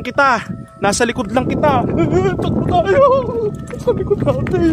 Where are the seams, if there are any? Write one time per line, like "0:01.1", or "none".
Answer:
none